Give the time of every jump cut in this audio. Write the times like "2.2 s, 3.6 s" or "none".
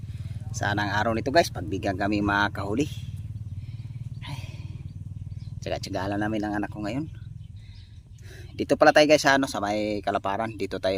none

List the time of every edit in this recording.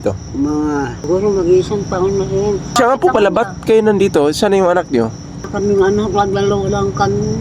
1.1 s, 2.8 s, 5.5 s

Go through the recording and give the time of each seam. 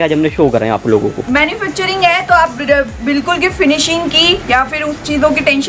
none

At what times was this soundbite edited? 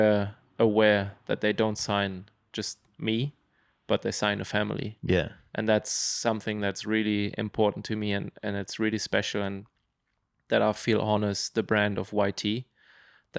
none

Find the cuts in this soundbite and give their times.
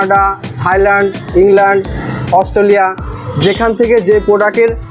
none

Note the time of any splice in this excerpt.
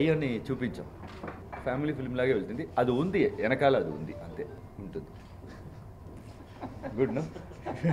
1.5 s, 4.6 s

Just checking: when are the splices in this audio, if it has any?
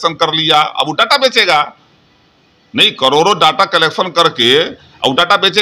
none

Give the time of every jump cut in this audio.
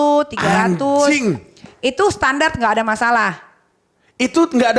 none

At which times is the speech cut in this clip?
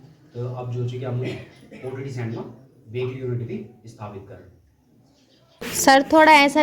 5.7 s

